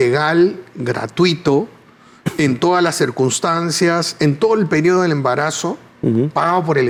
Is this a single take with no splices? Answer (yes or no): yes